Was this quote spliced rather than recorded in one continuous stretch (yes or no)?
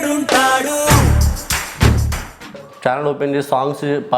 yes